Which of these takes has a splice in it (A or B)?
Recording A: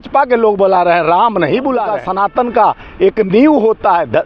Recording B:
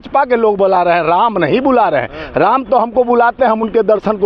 A